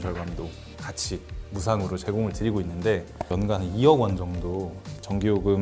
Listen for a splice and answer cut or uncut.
uncut